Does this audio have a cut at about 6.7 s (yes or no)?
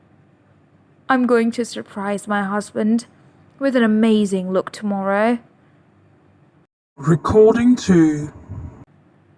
yes